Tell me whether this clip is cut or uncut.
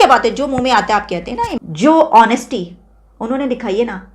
cut